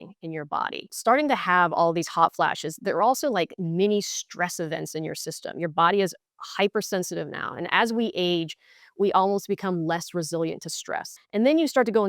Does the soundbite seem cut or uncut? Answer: cut